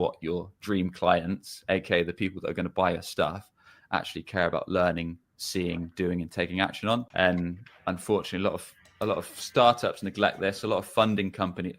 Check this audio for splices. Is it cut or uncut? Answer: cut